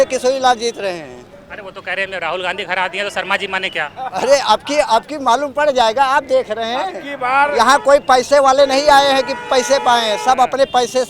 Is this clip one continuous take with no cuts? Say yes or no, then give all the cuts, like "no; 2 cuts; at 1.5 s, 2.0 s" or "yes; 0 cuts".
yes; 0 cuts